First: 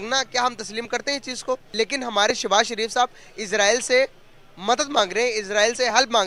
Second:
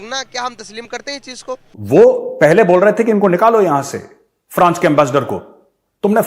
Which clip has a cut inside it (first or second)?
second